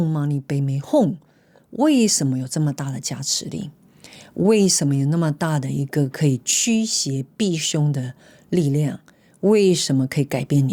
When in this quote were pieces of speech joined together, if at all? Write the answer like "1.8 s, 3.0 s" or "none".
none

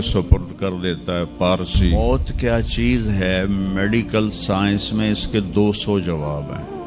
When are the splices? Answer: 1.9 s

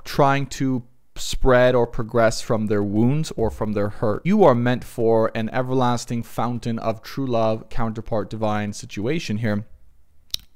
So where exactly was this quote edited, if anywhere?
4.2 s

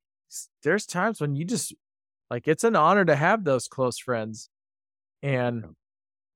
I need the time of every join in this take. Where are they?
none

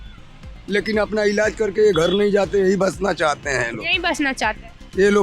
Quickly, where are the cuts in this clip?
none

